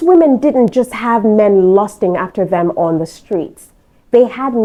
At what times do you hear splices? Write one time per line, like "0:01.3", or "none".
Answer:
none